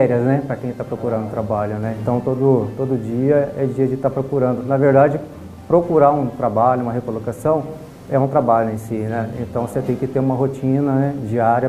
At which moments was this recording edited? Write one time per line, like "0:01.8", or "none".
none